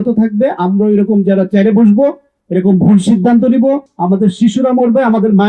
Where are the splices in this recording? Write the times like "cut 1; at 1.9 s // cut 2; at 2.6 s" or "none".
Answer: cut 1; at 3.9 s